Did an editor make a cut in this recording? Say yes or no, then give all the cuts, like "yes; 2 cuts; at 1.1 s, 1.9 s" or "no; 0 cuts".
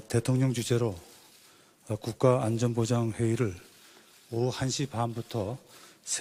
no; 0 cuts